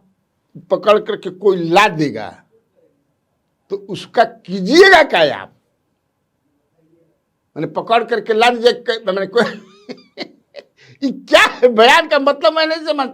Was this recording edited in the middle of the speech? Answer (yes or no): no